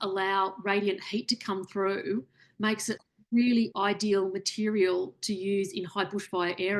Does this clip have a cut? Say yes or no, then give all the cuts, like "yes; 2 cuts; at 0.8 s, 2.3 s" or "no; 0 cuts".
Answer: no; 0 cuts